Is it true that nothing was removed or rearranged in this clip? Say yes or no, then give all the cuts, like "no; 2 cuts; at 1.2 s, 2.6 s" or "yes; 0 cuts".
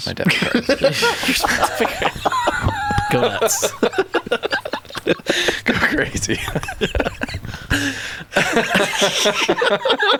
yes; 0 cuts